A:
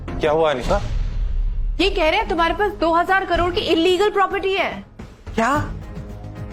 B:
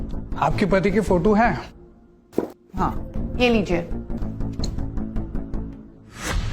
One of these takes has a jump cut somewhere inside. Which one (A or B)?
B